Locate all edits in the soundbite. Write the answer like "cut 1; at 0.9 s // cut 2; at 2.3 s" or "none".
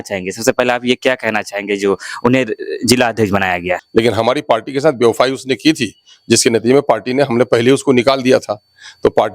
cut 1; at 3.8 s